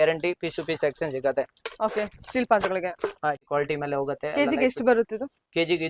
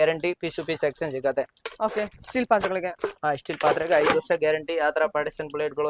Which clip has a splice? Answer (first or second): first